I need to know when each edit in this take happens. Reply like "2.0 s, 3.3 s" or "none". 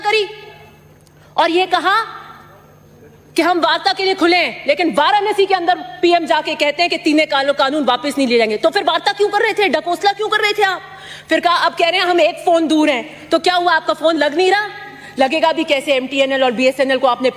none